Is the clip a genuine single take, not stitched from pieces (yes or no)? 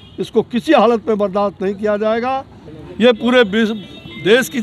yes